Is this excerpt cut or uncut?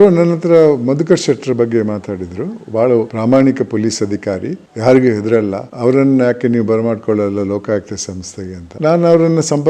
uncut